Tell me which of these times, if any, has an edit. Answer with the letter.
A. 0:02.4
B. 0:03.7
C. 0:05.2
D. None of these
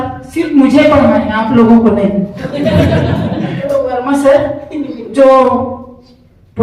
B